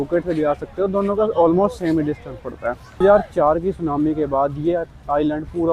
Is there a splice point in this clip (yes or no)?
yes